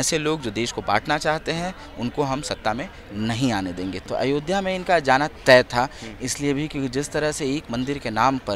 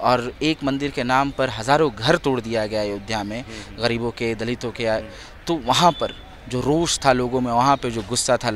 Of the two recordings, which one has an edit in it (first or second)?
first